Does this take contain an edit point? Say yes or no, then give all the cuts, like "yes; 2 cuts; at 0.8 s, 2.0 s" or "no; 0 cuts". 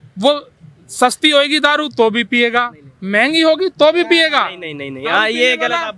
no; 0 cuts